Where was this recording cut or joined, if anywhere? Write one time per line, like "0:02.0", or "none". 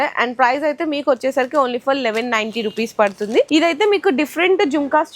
0:03.5